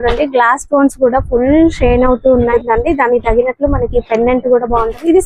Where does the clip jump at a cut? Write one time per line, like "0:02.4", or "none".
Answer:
0:02.5

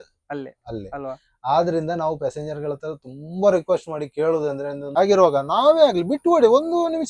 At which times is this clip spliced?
0:04.8

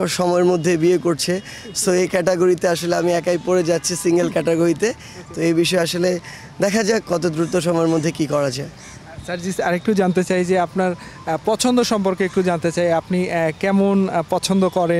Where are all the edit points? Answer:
none

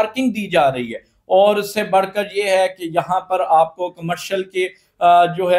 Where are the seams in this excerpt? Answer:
none

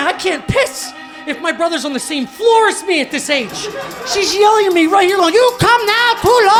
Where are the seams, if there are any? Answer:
none

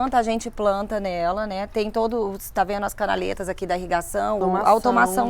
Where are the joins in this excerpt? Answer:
0:04.4

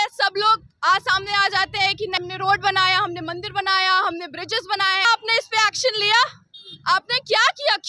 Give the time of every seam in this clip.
0:02.2
0:05.0

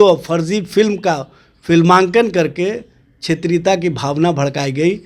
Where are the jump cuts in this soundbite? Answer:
none

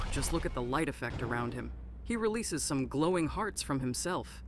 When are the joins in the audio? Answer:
none

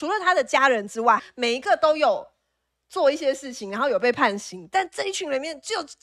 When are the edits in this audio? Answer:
0:01.2

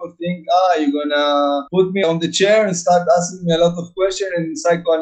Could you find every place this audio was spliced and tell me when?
none

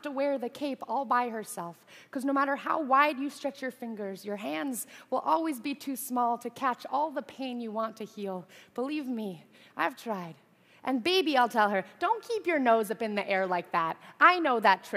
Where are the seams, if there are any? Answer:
0:12.6

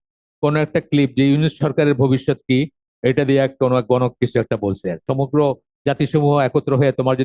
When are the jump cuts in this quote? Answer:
0:05.0

